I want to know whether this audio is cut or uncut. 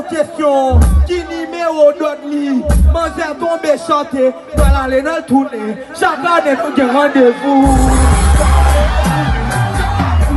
uncut